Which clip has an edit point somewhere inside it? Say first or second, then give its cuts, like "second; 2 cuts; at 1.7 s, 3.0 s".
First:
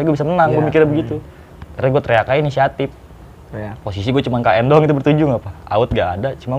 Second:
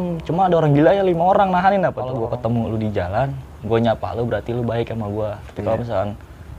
second; 1 cut; at 2.1 s